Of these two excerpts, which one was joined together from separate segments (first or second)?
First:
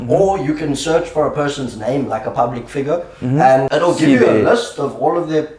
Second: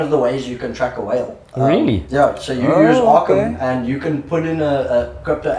first